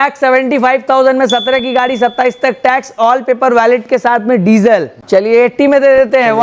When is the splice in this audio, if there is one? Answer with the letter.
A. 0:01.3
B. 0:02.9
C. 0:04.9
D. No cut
C